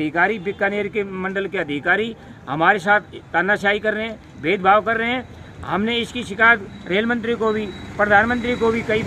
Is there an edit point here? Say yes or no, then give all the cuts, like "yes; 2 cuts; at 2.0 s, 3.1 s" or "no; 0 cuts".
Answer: no; 0 cuts